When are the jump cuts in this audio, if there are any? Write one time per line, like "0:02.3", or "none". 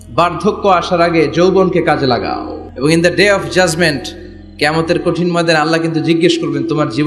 0:02.7